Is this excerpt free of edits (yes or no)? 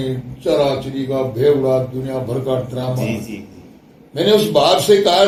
yes